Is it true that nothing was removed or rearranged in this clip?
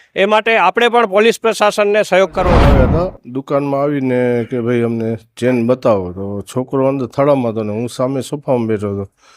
no; 1 cut; at 2.6 s

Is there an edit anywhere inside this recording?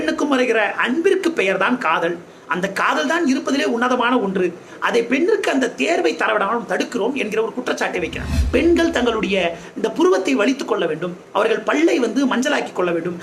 yes; 1 cut; at 8.4 s

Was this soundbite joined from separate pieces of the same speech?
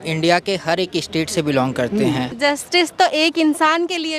yes; 1 cut; at 2.3 s

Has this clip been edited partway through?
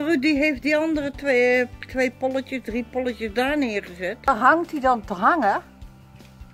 yes; 2 cuts; at 4.3 s, 5.6 s

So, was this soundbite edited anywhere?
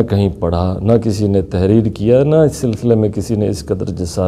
no; 0 cuts

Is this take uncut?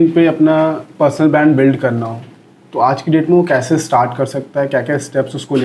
yes; 0 cuts

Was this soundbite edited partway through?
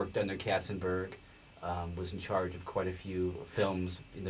yes; 1 cut; at 3.0 s

